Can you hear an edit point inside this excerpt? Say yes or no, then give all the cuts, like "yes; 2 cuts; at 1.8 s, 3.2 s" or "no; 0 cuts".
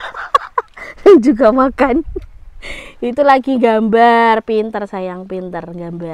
no; 0 cuts